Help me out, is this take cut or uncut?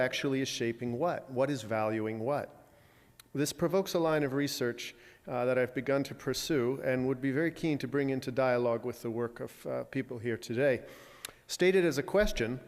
cut